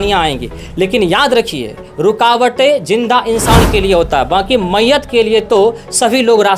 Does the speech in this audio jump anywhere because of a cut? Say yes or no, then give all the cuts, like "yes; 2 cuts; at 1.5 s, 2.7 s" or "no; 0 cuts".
no; 0 cuts